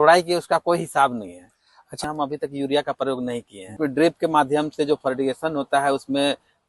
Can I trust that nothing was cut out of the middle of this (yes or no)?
no